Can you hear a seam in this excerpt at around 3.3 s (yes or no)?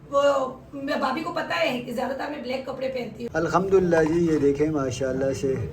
yes